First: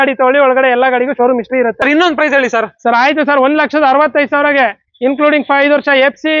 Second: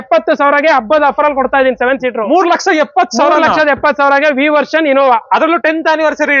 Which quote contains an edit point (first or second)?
first